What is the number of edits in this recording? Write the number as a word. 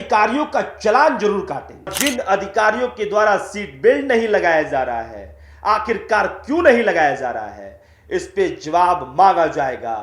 one